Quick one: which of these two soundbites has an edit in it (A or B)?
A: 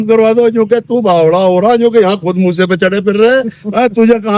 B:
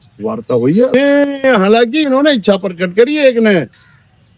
B